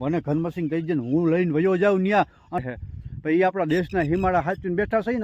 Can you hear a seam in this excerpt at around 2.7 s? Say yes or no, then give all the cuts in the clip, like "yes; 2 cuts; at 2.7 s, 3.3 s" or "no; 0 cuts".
yes; 1 cut; at 2.7 s